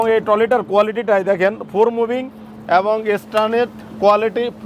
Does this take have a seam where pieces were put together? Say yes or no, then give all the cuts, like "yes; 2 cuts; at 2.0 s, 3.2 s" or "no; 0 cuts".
no; 0 cuts